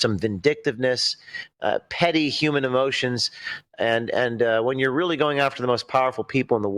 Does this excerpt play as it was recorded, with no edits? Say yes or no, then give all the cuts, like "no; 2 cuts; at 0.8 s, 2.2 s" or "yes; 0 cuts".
yes; 0 cuts